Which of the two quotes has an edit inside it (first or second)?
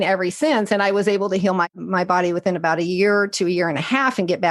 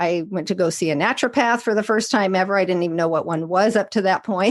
first